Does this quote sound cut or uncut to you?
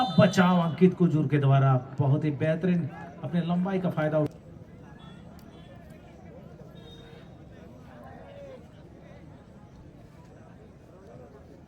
cut